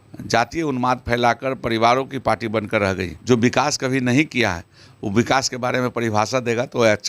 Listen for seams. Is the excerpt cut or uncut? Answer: cut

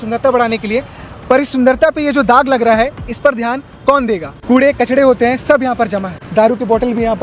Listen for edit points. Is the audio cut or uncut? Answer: cut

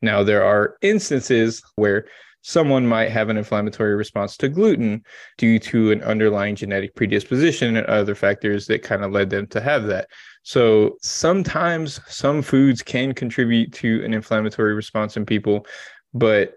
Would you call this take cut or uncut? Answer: cut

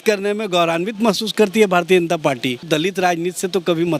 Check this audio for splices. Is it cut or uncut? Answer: cut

